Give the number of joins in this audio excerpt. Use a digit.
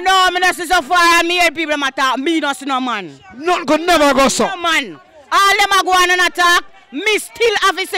0